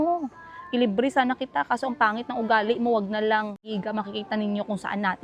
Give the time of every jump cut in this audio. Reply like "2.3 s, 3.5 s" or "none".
3.7 s